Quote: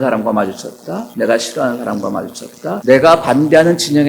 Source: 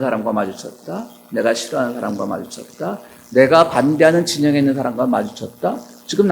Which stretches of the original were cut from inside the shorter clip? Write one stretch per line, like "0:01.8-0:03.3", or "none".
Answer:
0:01.0-0:01.2
0:03.0-0:03.3